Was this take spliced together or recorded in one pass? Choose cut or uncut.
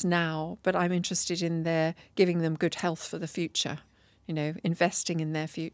uncut